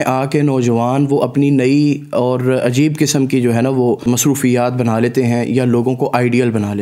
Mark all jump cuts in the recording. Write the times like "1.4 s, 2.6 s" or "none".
4.0 s